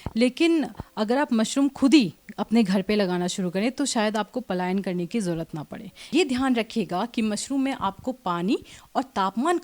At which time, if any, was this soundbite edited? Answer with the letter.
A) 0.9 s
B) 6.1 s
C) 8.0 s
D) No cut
B